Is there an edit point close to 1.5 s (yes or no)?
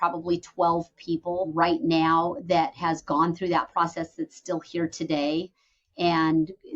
yes